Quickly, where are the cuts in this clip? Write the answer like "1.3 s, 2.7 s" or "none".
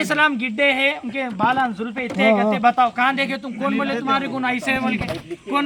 none